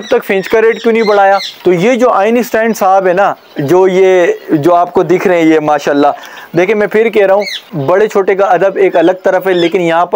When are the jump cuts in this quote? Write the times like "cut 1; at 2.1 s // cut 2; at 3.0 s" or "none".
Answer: cut 1; at 1.5 s